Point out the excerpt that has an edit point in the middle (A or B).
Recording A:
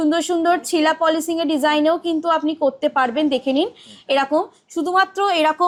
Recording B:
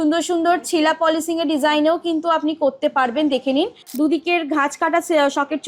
B